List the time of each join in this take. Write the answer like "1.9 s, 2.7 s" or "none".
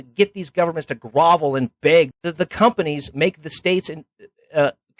2.2 s

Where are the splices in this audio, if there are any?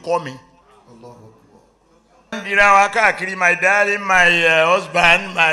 2.4 s

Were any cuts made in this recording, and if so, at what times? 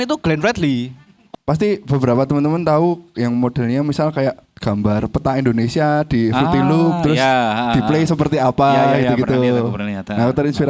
1.2 s

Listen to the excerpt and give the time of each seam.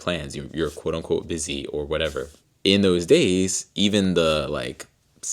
2.4 s

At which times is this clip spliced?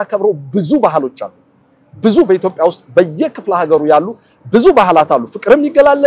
none

